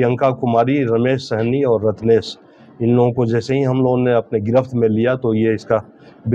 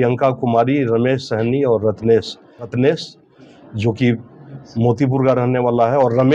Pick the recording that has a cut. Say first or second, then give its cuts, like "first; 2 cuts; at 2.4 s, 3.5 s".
second; 1 cut; at 2.7 s